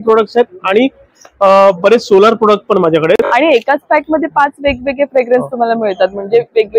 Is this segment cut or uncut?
cut